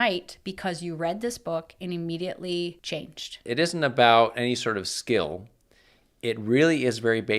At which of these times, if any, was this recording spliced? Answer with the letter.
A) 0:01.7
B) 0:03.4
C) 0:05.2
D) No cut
B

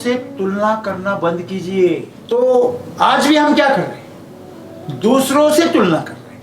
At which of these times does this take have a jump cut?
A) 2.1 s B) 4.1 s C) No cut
A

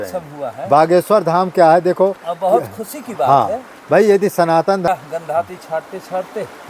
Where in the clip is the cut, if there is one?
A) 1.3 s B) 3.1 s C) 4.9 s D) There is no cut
C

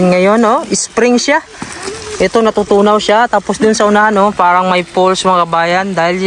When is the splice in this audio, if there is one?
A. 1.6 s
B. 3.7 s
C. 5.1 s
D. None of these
D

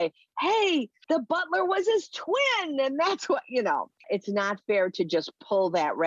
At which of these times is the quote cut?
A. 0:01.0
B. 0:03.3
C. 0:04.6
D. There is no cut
A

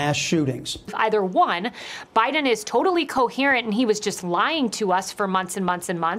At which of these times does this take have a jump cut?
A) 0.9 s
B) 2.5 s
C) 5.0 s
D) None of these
A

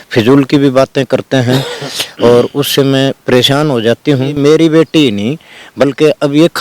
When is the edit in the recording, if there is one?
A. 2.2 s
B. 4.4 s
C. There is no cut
B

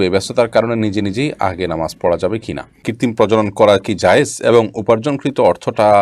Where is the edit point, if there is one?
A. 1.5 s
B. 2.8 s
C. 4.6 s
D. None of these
B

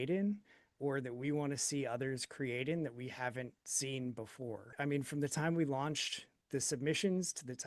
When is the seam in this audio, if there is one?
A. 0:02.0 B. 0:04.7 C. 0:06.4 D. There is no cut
B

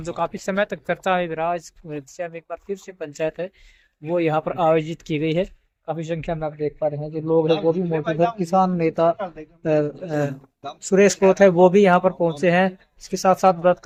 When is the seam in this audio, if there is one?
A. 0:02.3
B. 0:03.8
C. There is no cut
C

